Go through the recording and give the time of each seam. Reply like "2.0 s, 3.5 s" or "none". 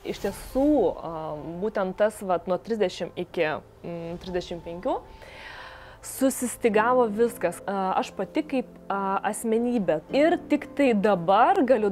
7.6 s, 10.0 s